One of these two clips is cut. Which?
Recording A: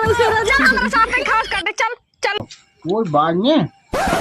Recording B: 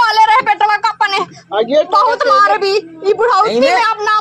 A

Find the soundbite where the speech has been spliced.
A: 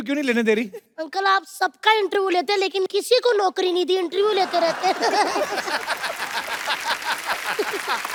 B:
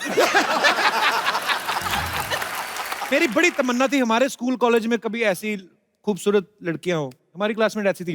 B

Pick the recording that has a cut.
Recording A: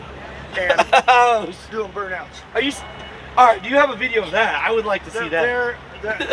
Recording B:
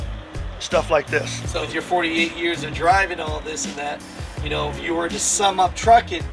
B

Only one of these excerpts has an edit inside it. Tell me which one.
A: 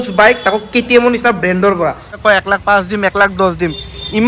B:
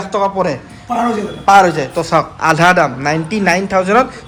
A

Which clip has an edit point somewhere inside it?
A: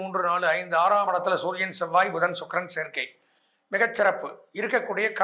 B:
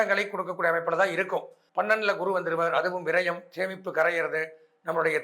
B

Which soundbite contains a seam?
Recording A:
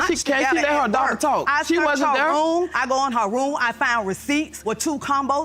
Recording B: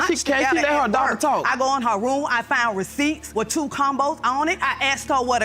B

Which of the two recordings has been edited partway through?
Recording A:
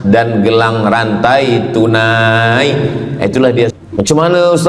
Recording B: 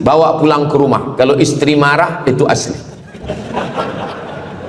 A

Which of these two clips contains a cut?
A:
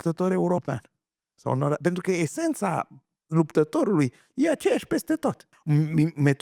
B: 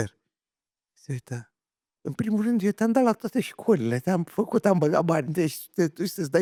A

